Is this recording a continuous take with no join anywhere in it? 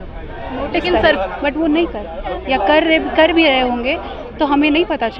no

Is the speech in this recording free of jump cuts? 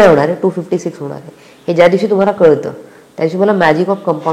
yes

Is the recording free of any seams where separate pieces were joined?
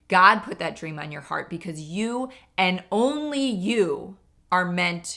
yes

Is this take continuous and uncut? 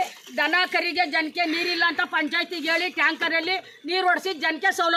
yes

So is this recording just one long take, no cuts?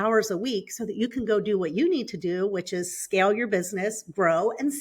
yes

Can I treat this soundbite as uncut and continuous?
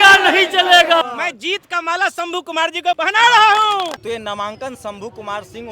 no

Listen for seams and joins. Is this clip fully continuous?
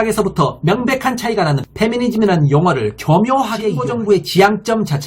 no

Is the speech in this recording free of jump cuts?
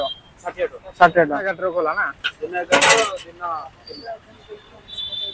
no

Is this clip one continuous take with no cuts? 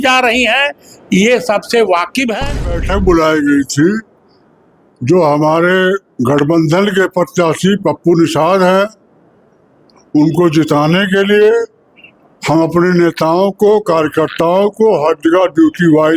no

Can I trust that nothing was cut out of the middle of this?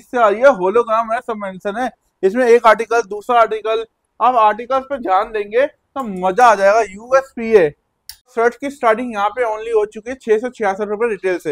no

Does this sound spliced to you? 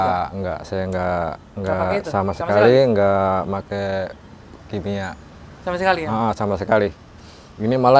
no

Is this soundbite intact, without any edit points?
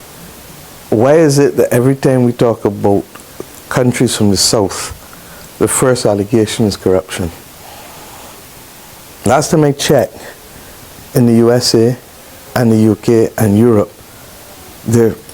yes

